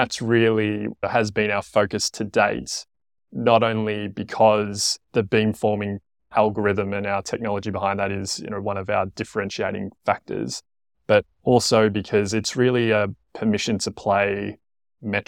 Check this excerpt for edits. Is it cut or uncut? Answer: uncut